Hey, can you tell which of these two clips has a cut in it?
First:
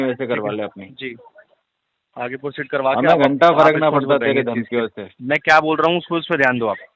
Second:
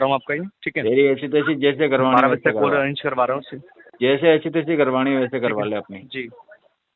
first; 1 cut; at 5.1 s

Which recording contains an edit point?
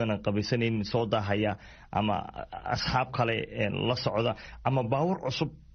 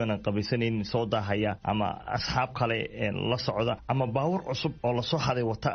second; 3 cuts; at 1.8 s, 3.8 s, 4.8 s

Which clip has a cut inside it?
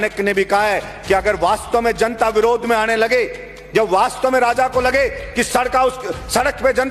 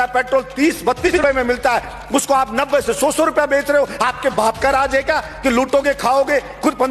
second; 1 cut; at 1.1 s

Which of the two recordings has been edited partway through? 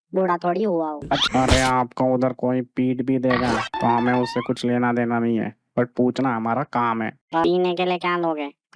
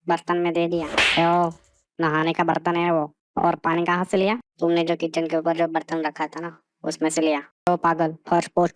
first; 2 cuts; at 1.2 s, 7.4 s

